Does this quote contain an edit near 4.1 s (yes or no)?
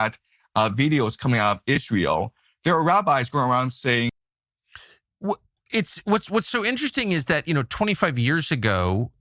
yes